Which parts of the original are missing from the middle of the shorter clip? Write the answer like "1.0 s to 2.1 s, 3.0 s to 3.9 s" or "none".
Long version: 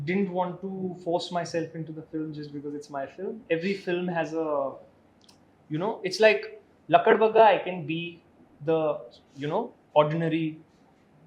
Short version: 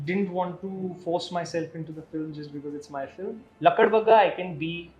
3.3 s to 6.6 s